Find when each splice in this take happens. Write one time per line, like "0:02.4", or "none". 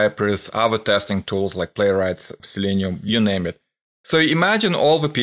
0:02.4